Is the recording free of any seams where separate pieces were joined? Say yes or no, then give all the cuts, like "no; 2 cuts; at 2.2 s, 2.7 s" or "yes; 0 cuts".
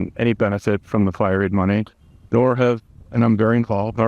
yes; 0 cuts